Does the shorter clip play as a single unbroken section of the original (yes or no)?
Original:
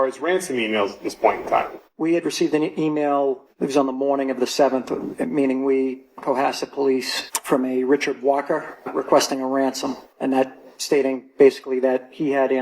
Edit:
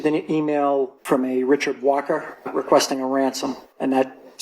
no